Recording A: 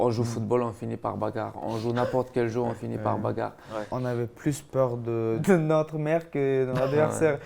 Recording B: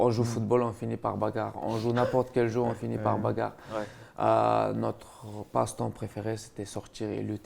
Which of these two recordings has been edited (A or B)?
A